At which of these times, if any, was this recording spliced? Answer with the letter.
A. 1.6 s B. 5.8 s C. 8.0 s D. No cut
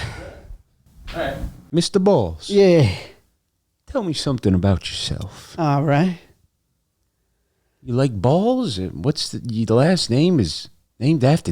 A